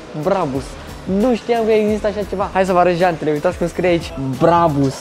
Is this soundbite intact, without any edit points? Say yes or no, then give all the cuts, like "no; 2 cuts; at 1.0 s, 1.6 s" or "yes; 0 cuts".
no; 1 cut; at 2.5 s